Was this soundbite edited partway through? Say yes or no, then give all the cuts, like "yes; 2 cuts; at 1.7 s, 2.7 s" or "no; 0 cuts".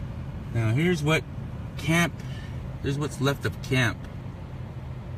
yes; 1 cut; at 3.6 s